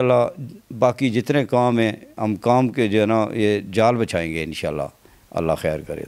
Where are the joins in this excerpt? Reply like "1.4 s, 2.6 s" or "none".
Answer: none